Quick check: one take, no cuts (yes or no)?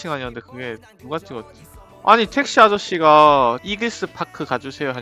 no